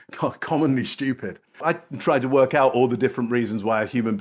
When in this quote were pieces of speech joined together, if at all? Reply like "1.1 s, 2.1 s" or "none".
1.6 s